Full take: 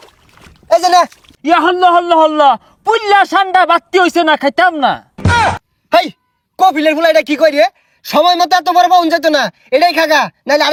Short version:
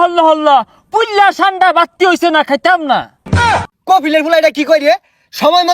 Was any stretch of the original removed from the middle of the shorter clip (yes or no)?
yes